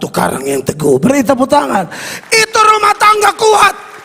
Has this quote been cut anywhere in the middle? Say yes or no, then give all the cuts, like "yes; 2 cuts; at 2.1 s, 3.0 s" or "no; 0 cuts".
no; 0 cuts